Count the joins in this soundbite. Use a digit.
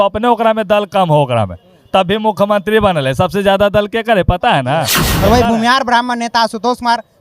1